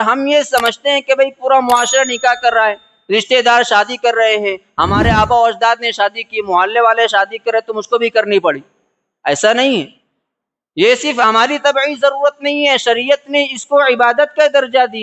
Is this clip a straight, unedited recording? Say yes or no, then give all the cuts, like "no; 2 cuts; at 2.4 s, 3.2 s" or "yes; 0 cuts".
yes; 0 cuts